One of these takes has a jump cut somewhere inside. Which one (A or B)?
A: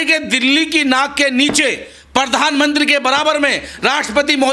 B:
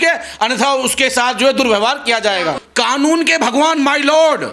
B